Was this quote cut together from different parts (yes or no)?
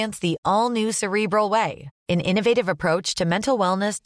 no